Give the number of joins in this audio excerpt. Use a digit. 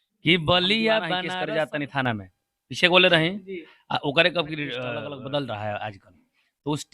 2